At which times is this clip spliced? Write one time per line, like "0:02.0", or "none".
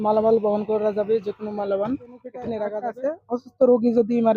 0:02.6